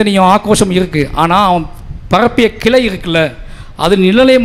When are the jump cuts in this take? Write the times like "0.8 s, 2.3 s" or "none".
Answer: none